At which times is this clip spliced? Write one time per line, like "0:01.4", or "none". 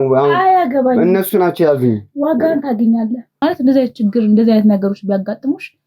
0:03.4